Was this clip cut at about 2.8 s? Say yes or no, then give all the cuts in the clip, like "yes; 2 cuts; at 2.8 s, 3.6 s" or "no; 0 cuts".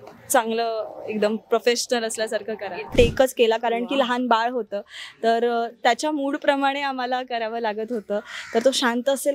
yes; 1 cut; at 2.8 s